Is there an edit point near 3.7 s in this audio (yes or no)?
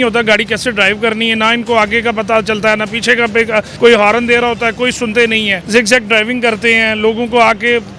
yes